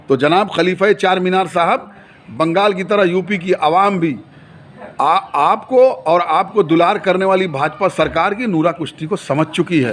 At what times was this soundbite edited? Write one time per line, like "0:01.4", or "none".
none

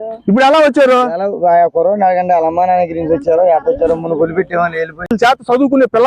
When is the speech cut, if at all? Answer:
0:05.1

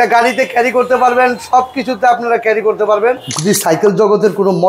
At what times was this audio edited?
0:03.3

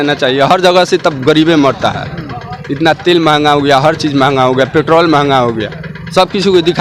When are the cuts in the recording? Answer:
none

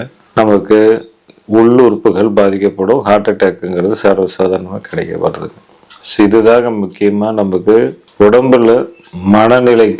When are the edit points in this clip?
none

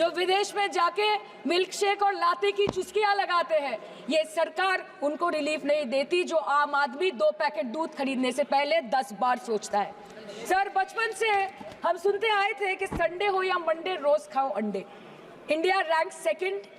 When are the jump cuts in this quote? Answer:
none

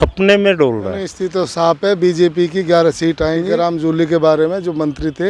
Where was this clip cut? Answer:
0:01.1
0:03.5

